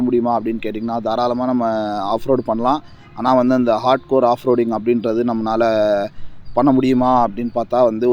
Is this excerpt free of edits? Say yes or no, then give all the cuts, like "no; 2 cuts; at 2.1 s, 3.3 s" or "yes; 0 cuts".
yes; 0 cuts